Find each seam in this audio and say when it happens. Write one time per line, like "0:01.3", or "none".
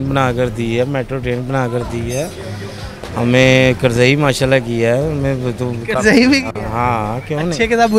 none